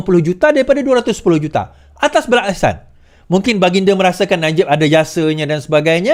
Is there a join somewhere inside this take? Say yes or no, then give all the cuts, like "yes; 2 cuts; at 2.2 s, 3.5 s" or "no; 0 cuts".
no; 0 cuts